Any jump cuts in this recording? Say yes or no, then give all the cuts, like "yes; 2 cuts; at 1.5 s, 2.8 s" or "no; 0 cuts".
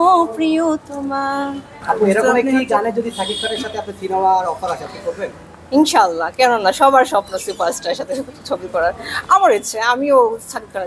no; 0 cuts